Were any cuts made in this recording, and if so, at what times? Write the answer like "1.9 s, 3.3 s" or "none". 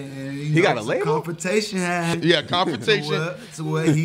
2.2 s